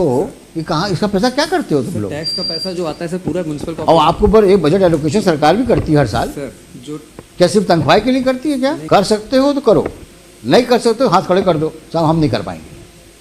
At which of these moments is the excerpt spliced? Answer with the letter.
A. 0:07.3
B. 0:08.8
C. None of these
B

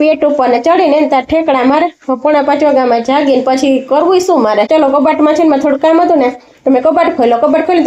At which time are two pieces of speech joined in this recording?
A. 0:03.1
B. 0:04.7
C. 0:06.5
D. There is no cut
B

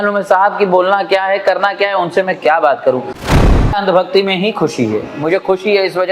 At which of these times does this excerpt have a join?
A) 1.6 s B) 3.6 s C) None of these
B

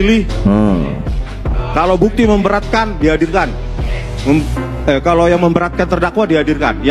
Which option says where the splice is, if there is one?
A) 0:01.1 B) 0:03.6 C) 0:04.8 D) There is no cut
D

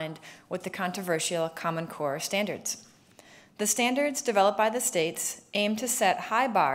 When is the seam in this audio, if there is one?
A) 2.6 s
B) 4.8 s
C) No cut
A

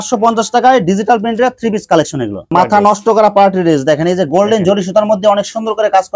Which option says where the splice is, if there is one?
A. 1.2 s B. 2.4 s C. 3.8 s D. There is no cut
B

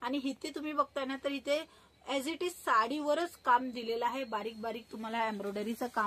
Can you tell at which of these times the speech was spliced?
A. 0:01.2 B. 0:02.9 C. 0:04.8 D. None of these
D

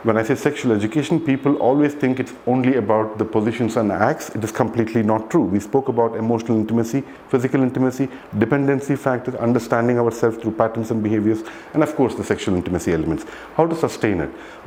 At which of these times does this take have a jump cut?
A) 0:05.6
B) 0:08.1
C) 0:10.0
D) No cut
D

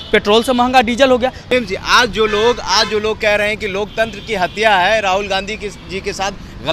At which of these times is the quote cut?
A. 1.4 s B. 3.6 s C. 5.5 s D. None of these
A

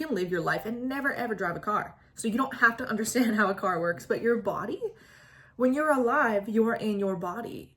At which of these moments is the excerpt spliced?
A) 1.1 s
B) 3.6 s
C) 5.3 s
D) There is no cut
D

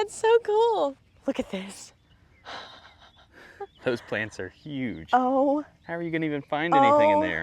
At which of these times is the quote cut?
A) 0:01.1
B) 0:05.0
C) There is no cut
A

